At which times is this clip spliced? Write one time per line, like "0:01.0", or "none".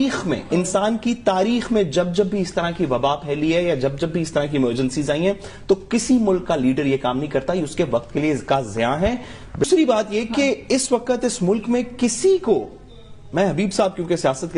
none